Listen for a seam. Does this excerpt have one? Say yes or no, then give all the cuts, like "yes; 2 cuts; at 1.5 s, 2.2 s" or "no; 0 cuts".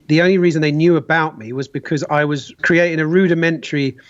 yes; 1 cut; at 2.6 s